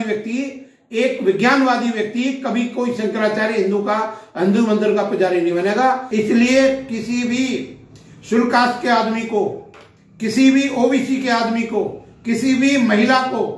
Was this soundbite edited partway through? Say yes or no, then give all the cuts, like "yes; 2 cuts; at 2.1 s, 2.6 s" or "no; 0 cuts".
yes; 1 cut; at 6.0 s